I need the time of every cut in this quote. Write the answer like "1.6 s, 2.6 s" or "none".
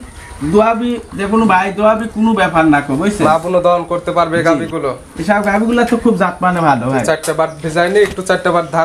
none